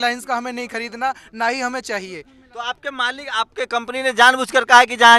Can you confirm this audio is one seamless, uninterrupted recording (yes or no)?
yes